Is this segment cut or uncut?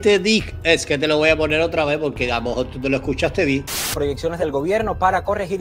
cut